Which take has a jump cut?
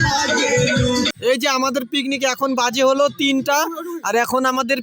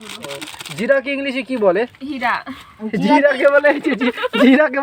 first; 1 cut; at 1.1 s

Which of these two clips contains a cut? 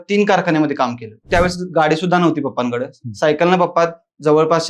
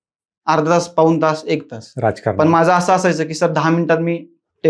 first; 1 cut; at 1.3 s

